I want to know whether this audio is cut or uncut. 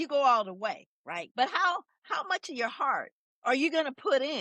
cut